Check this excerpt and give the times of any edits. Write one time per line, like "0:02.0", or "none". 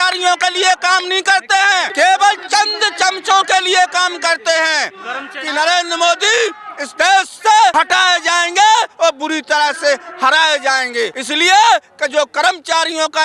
0:01.9
0:05.4
0:07.7
0:11.2